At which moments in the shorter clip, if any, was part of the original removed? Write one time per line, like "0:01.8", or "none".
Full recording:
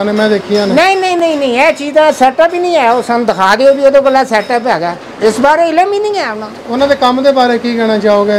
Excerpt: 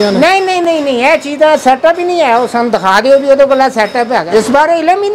0:04.2